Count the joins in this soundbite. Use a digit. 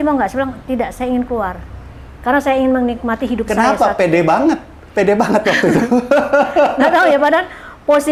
0